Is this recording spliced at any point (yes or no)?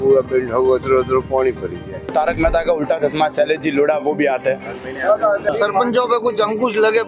yes